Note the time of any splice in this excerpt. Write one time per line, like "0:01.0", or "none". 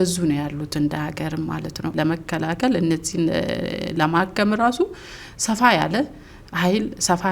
0:01.9